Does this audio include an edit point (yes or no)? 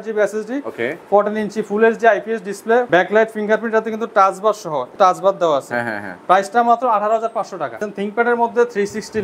yes